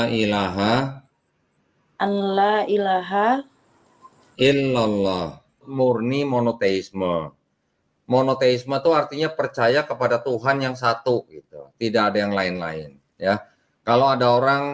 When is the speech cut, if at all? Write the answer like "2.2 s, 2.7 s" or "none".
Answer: 5.7 s